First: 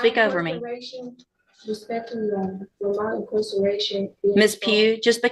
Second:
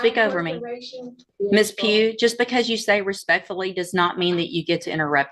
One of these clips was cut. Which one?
second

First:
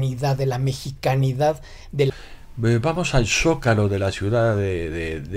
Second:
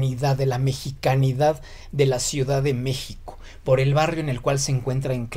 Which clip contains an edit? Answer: first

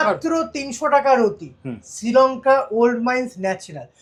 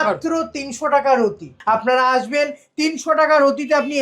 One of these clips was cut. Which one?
second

